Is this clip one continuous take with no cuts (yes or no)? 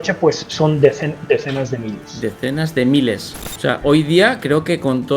no